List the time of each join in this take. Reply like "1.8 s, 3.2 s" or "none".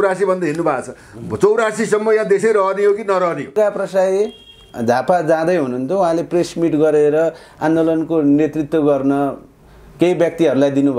3.5 s